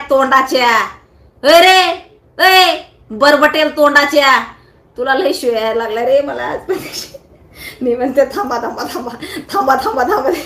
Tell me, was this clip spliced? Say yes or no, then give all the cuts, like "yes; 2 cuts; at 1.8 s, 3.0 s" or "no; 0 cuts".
no; 0 cuts